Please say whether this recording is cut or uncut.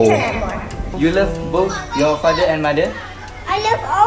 cut